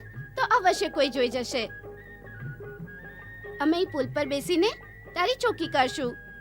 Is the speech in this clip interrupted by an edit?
no; 0 cuts

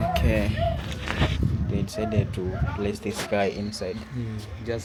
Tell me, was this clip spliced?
no; 0 cuts

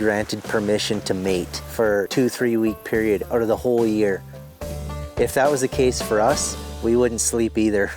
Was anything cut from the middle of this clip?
yes; 2 cuts; at 2.0 s, 4.8 s

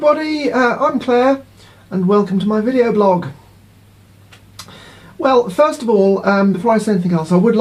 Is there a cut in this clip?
no; 0 cuts

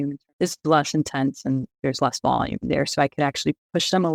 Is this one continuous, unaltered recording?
yes; 0 cuts

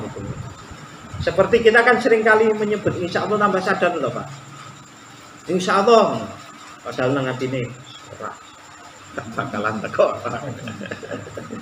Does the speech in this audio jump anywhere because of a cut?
no; 0 cuts

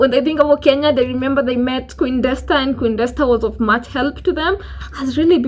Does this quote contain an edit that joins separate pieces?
no; 0 cuts

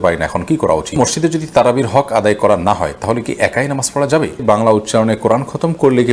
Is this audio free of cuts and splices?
no; 2 cuts; at 1.0 s, 4.4 s

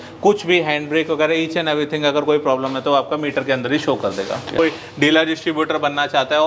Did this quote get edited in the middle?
yes; 1 cut; at 4.6 s

